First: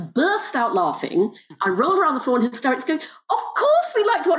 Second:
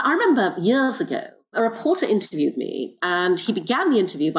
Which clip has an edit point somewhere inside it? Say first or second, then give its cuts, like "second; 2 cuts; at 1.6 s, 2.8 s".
second; 2 cuts; at 1.5 s, 3.0 s